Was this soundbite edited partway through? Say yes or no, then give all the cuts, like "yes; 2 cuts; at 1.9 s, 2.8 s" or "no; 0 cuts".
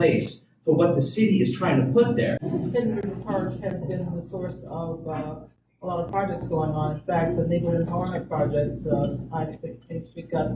yes; 1 cut; at 2.4 s